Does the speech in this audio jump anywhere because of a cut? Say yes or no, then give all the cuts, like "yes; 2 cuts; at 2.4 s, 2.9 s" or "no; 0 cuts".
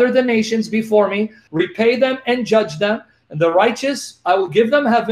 yes; 1 cut; at 1.4 s